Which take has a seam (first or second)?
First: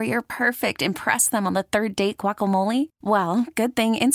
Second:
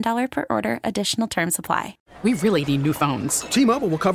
second